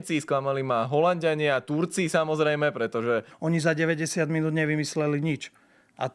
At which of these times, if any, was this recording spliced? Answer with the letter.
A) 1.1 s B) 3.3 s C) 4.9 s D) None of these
B